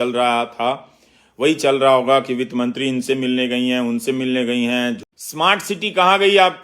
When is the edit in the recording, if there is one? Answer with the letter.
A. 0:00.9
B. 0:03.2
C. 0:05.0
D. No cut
C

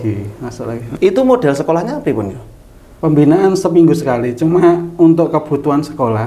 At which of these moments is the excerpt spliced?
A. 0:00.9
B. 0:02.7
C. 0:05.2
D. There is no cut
A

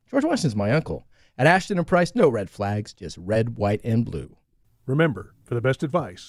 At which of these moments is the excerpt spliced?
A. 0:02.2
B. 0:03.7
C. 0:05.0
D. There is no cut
D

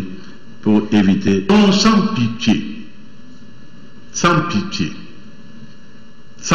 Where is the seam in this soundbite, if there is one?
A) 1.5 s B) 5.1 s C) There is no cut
A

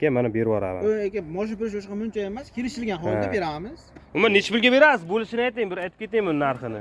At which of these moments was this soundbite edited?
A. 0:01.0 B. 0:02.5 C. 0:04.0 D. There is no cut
C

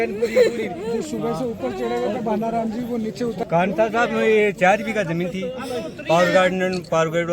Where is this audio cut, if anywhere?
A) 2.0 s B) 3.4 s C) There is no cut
B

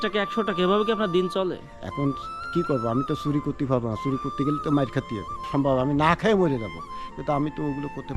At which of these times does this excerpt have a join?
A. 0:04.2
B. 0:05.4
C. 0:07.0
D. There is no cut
B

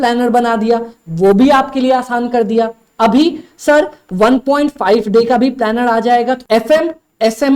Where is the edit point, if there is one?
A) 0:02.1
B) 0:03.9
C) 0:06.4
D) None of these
C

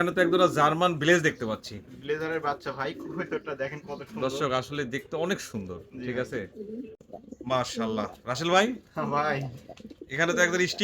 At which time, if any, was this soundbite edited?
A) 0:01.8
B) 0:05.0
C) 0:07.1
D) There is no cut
C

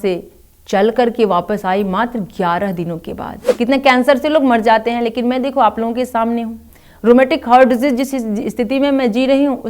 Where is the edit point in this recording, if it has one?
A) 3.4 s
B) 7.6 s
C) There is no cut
A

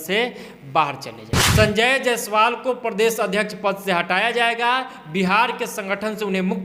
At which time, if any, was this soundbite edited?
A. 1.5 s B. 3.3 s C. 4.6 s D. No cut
A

